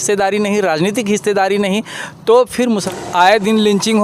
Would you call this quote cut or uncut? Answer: cut